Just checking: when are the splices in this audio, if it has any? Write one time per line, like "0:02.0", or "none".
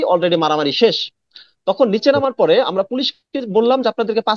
none